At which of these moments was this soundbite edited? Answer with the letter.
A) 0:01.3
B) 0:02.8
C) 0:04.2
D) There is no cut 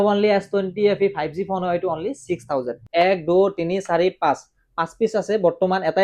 B